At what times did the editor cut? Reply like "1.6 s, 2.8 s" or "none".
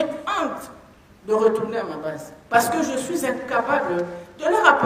none